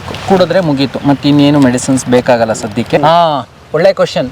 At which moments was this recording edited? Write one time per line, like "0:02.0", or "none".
0:03.0